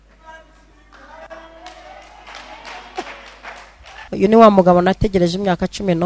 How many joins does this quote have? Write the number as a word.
one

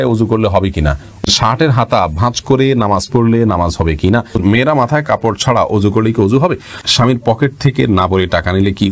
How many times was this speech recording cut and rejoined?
three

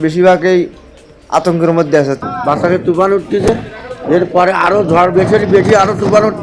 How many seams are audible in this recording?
one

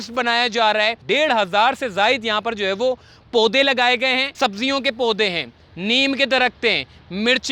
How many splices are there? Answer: two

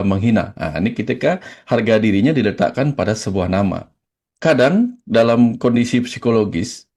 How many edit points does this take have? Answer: one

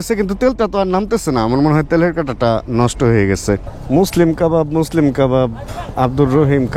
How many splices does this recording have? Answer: one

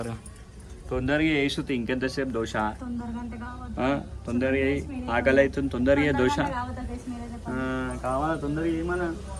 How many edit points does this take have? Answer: zero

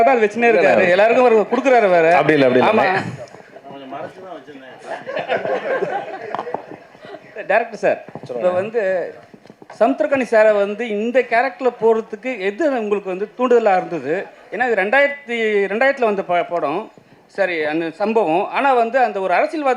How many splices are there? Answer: zero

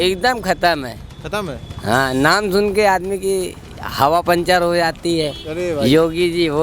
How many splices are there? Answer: zero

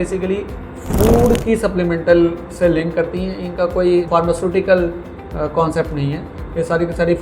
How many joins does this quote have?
one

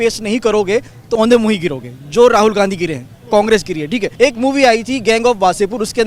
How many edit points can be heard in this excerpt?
two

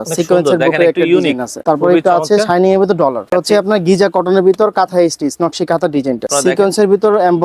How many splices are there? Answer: three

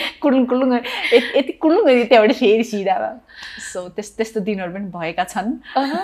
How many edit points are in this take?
zero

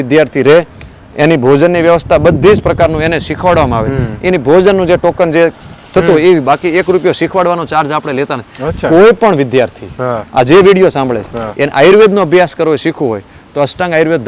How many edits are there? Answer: zero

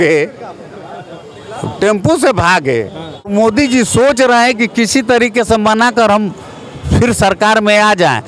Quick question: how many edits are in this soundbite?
one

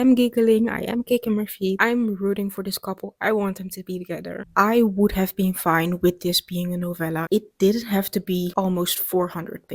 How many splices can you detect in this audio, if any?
three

